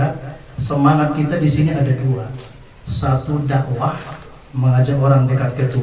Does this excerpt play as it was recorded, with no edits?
yes; 0 cuts

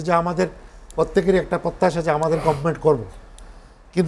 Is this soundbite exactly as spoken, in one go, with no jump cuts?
yes; 0 cuts

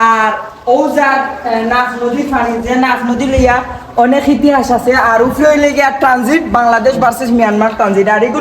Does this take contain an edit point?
no; 0 cuts

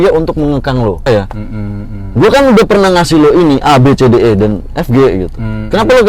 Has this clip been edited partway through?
yes; 1 cut; at 1.0 s

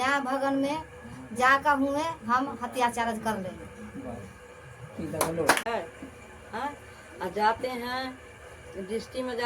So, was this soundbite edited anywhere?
yes; 1 cut; at 5.7 s

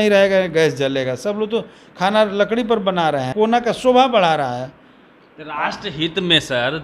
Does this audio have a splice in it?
yes; 1 cut; at 3.3 s

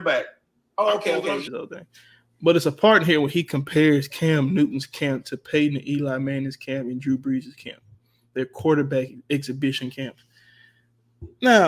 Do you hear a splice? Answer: yes; 1 cut; at 1.4 s

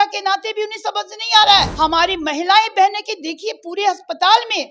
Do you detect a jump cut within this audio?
yes; 1 cut; at 1.7 s

